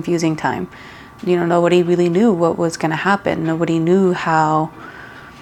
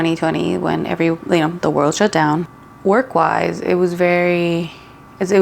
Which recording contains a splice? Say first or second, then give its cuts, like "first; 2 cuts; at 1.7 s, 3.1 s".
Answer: second; 1 cut; at 2.5 s